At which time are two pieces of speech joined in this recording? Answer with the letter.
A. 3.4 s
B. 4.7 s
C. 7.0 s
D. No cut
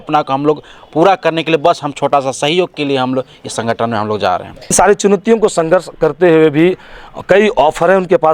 B